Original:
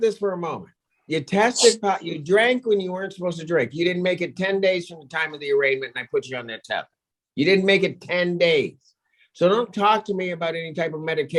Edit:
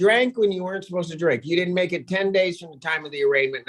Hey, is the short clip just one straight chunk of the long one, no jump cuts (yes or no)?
yes